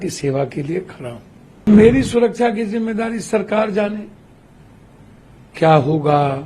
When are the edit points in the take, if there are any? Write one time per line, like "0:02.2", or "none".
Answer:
0:01.6